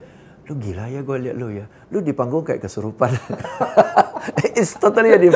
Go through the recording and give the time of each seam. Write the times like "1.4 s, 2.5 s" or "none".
none